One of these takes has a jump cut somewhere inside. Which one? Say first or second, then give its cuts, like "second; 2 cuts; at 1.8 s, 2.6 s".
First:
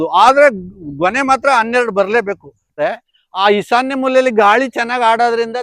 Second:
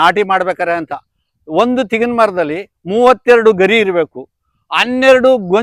first; 1 cut; at 2.7 s